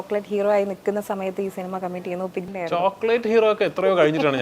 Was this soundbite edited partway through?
yes; 1 cut; at 2.5 s

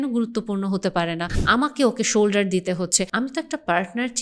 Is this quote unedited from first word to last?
no; 2 cuts; at 1.3 s, 3.1 s

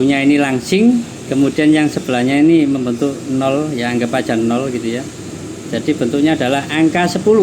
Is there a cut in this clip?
yes; 1 cut; at 1.2 s

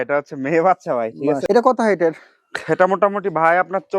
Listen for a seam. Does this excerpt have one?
yes; 1 cut; at 1.4 s

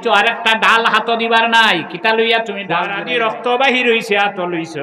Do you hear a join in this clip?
yes; 1 cut; at 2.9 s

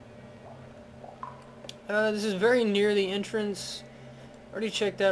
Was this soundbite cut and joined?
no; 0 cuts

